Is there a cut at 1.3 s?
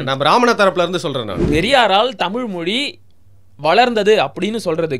yes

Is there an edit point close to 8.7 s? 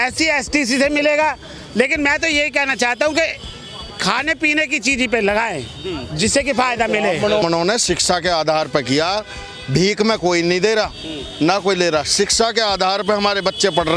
no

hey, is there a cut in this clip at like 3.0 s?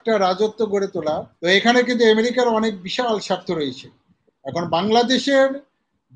no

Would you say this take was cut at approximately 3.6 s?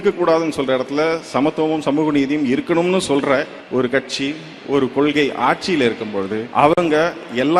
yes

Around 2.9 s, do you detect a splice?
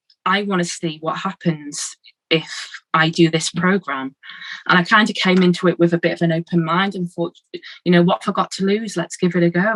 no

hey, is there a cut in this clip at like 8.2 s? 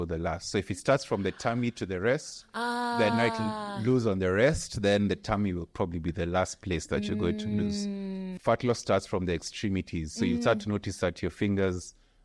yes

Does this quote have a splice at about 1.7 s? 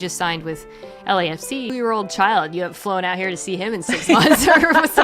yes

